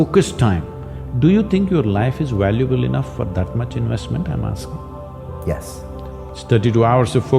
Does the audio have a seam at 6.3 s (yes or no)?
yes